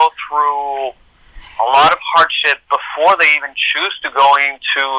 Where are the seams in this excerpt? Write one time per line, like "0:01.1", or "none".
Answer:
none